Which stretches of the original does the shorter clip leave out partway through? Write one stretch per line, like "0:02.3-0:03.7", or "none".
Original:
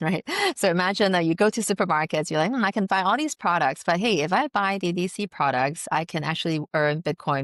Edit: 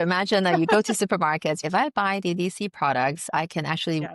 0:02.3-0:04.2